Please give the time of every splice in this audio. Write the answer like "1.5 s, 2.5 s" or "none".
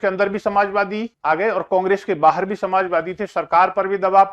1.1 s

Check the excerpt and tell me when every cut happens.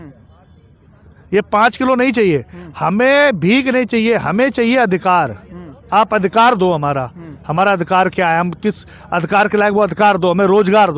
none

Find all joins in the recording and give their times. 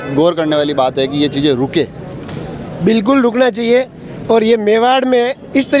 none

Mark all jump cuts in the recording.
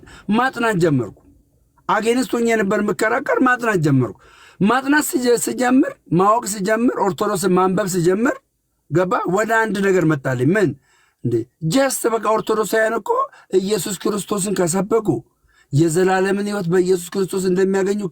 none

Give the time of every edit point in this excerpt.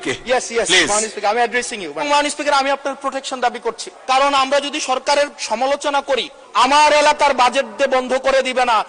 2.0 s, 3.9 s, 6.4 s

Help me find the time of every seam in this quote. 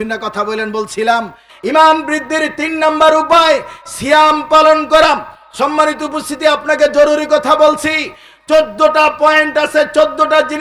1.5 s

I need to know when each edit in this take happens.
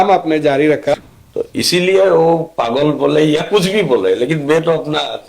0.9 s

